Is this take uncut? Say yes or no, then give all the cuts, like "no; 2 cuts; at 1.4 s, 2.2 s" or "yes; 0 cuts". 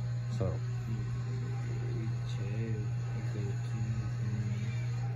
yes; 0 cuts